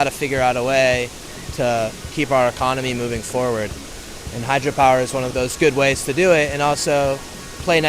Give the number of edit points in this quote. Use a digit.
2